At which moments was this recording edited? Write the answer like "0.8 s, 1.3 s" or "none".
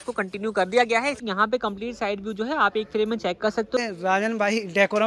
1.2 s, 3.8 s